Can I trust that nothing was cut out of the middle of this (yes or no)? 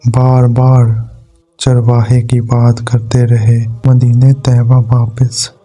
no